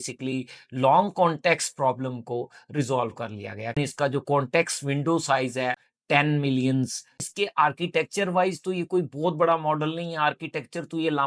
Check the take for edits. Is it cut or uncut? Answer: cut